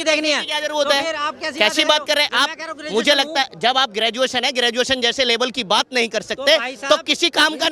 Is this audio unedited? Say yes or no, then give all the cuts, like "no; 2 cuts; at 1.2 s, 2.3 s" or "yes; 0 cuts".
yes; 0 cuts